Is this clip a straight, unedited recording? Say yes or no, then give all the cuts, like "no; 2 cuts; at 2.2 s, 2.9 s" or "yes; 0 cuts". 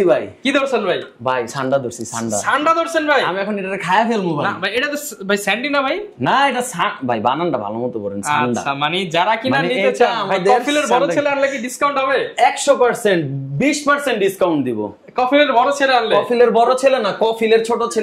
yes; 0 cuts